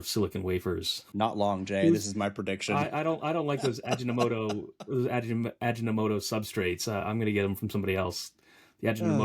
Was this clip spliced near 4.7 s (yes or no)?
no